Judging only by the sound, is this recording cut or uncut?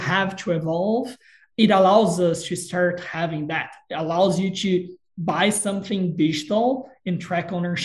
uncut